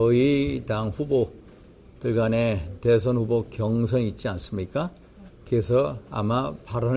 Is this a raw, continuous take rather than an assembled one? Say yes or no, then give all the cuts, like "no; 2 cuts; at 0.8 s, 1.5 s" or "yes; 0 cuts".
yes; 0 cuts